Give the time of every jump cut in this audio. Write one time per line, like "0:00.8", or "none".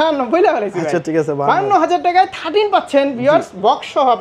none